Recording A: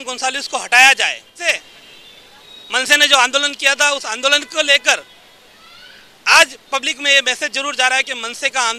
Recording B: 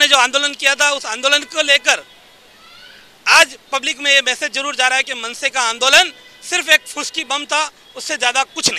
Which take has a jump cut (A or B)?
A